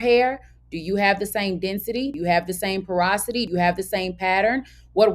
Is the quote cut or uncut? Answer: cut